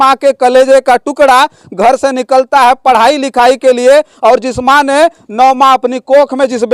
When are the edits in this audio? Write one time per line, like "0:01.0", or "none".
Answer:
none